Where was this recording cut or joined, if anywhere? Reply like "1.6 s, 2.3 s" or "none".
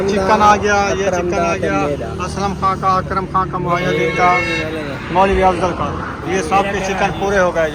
none